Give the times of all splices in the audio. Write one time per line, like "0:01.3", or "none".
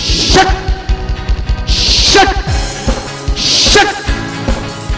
none